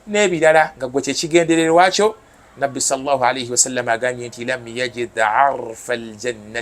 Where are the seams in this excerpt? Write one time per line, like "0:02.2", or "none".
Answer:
none